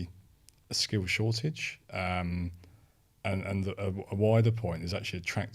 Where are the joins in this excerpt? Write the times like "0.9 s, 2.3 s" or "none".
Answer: none